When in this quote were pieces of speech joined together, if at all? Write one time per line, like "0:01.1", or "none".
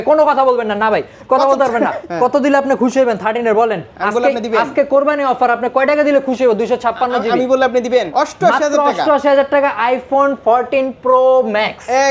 0:02.1
0:08.1